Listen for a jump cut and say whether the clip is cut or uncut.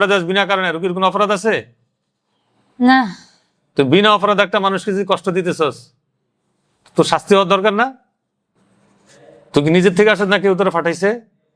uncut